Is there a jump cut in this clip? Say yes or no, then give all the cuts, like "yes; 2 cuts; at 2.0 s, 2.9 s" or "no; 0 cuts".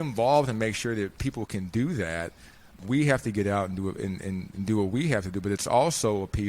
yes; 2 cuts; at 1.1 s, 2.7 s